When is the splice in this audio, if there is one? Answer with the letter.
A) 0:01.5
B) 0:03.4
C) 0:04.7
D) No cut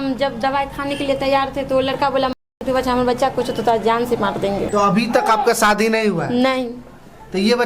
C